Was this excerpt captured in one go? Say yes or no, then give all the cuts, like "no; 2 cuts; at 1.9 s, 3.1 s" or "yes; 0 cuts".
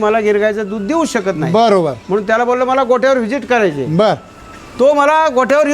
yes; 0 cuts